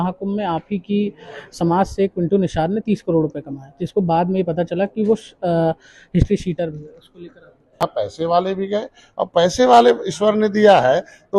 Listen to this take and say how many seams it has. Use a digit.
1